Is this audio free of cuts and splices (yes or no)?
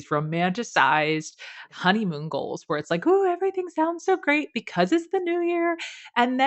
no